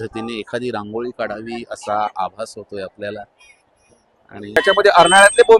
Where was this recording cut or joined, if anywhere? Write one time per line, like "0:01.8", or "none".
0:04.6